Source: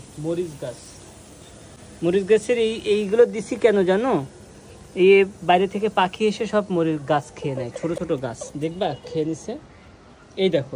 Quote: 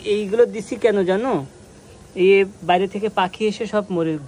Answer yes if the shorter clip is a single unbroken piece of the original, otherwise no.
yes